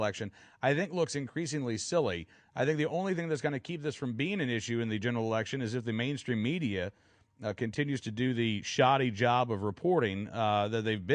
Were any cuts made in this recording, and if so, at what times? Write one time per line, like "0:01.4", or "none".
0:03.8